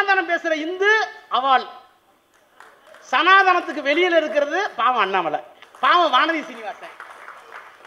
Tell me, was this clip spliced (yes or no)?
yes